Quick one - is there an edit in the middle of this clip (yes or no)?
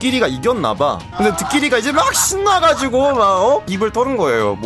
yes